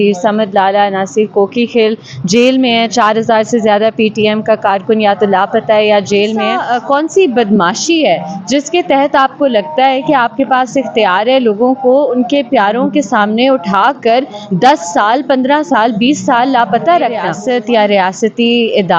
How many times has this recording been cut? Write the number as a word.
two